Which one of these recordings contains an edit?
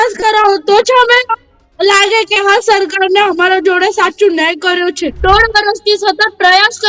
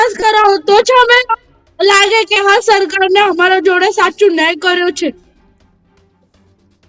first; 1 cut; at 5.2 s

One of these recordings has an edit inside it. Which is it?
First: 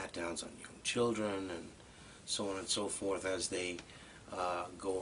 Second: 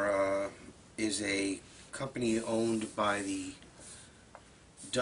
first; 1 cut; at 3.8 s

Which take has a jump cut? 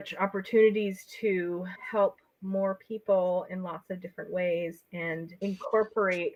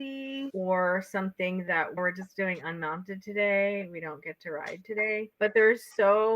second; 1 cut; at 5.3 s

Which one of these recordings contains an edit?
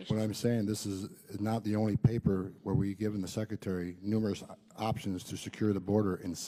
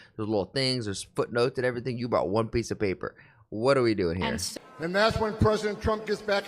second; 1 cut; at 4.4 s

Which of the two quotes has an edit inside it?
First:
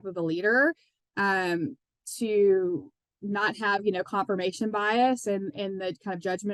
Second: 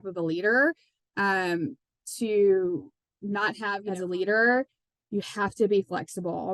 second; 1 cut; at 3.8 s

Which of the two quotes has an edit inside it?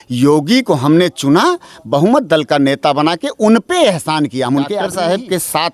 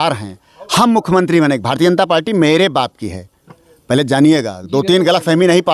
first; 1 cut; at 4.8 s

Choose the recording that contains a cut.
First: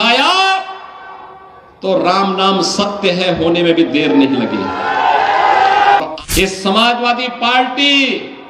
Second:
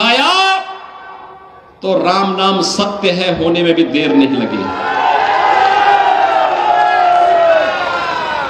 first; 1 cut; at 6.0 s

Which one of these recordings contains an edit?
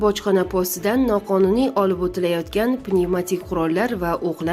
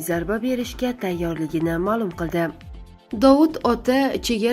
second; 1 cut; at 2.7 s

